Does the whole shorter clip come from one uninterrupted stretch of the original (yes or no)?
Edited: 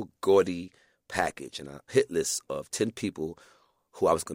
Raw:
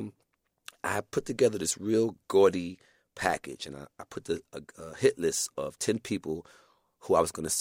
no